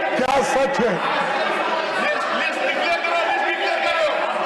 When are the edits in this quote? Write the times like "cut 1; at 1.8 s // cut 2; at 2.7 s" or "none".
none